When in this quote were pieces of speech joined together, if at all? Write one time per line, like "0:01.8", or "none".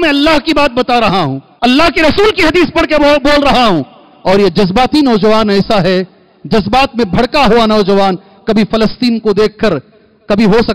0:01.4